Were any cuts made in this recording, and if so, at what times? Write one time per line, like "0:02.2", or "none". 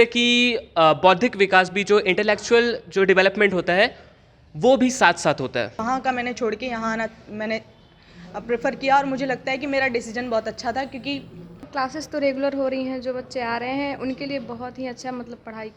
0:05.8
0:11.7